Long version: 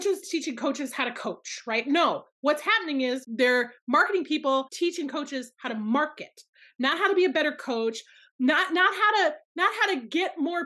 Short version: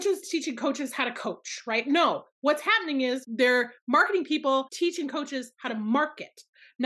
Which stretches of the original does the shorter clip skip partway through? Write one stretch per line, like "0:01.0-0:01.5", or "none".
none